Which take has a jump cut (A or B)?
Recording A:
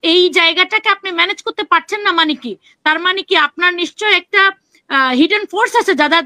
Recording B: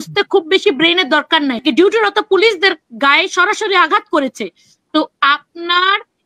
B